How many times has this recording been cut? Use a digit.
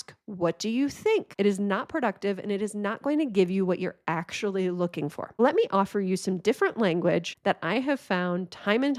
3